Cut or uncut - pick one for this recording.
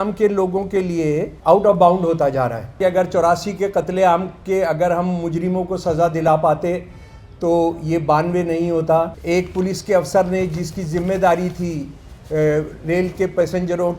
cut